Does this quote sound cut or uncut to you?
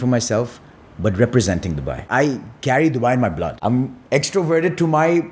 cut